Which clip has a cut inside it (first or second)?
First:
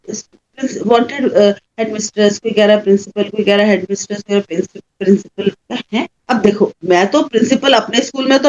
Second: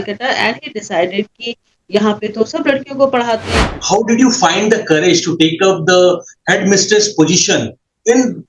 second